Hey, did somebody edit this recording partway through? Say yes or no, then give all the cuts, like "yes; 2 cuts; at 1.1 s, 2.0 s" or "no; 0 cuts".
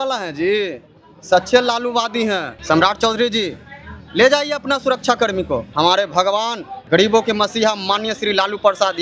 yes; 3 cuts; at 2.5 s, 5.7 s, 6.7 s